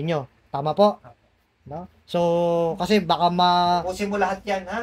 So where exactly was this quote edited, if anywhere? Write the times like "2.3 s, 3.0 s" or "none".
3.8 s